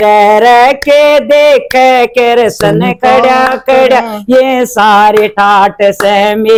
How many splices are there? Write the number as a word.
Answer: zero